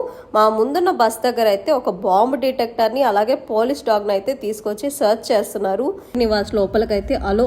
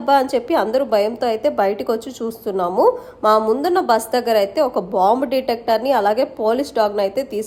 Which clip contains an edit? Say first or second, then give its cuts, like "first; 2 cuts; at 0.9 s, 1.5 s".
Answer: first; 1 cut; at 6.1 s